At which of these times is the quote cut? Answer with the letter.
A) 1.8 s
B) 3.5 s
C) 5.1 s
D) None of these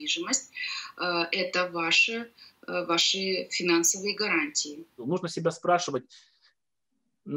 C